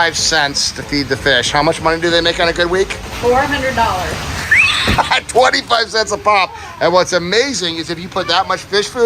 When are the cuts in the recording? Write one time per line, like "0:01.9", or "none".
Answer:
none